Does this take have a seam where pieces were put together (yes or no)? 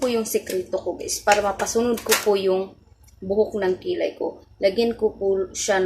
no